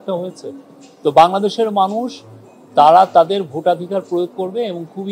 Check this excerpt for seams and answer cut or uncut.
uncut